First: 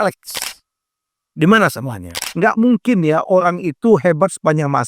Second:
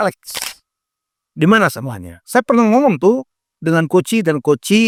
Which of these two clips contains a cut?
first; 1 cut; at 2.2 s

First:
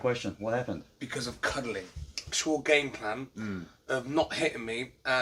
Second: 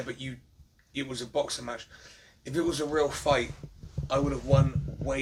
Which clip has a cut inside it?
first; 1 cut; at 2.3 s

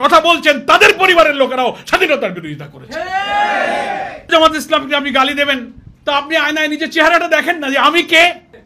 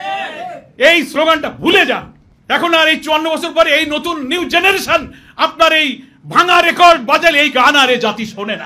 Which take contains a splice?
first; 1 cut; at 4.3 s

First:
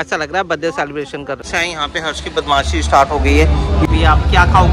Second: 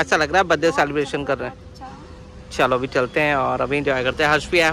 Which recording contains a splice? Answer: first; 2 cuts; at 1.4 s, 3.8 s

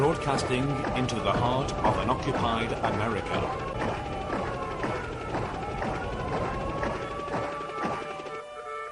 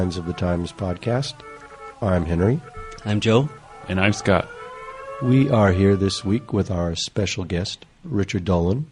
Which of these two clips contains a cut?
first; 1 cut; at 2.8 s

